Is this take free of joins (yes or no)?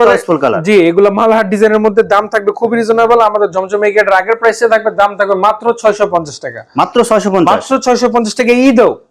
yes